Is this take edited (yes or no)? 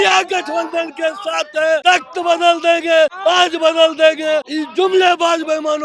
yes